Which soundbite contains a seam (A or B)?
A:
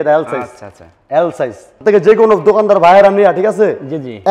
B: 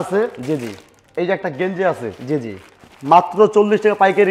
A